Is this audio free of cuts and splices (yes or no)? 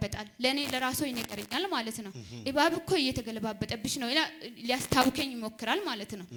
yes